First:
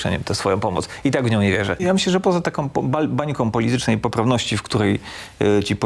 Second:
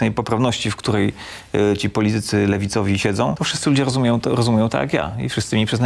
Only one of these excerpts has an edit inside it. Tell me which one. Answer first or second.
first